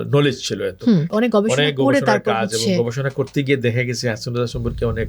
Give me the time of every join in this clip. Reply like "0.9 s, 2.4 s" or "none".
1.1 s